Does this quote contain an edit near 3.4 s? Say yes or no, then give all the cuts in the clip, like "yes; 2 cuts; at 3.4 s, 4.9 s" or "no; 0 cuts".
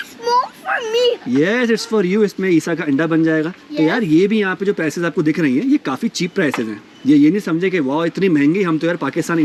no; 0 cuts